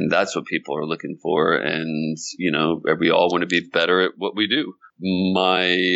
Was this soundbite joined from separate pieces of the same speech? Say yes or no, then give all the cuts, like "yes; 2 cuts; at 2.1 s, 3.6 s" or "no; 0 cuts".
yes; 1 cut; at 4.8 s